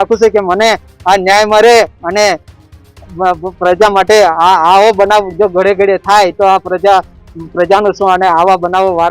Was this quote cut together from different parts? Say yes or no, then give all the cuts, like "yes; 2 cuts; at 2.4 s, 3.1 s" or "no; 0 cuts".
no; 0 cuts